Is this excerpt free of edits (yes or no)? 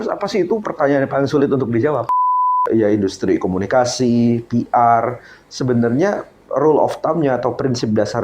no